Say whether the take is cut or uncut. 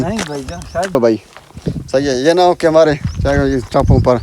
cut